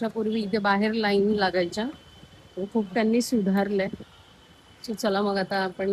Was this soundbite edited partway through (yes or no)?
no